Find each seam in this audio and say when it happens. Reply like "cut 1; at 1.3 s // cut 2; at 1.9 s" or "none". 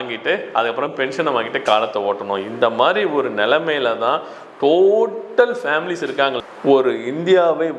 cut 1; at 6.4 s